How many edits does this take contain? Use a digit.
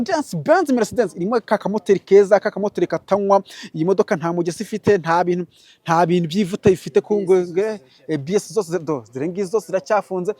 0